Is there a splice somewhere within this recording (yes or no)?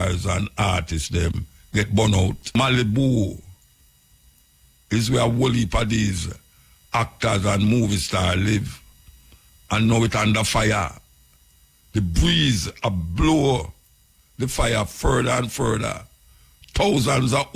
yes